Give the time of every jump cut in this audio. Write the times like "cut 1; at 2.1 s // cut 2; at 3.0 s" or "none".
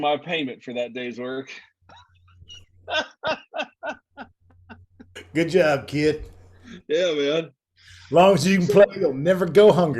cut 1; at 5.2 s